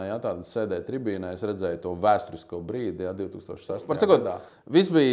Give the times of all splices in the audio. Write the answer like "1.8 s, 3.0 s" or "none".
3.8 s